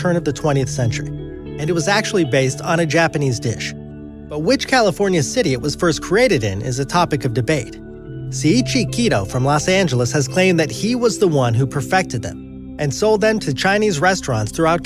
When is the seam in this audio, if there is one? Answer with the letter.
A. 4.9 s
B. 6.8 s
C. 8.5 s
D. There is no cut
B